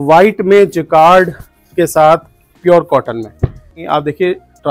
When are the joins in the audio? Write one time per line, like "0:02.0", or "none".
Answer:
0:03.8